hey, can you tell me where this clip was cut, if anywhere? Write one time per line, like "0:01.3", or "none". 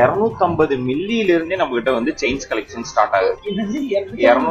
none